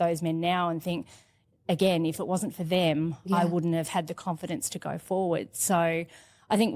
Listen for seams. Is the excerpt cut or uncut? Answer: uncut